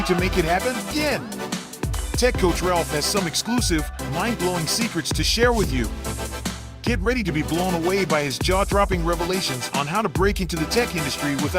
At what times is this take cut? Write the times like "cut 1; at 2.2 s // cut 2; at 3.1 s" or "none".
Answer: cut 1; at 0.9 s